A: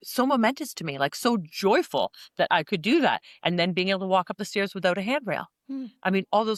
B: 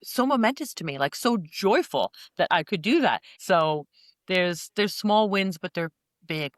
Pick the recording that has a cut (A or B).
B